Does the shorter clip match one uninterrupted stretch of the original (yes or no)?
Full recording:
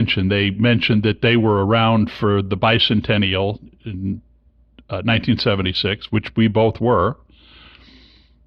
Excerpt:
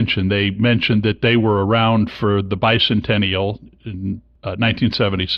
no